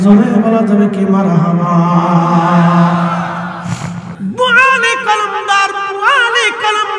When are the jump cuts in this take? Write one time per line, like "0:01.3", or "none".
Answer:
0:04.0